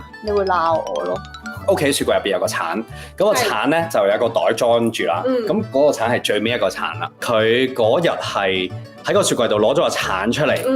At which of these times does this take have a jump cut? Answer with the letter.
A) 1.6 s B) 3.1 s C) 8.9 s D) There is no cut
A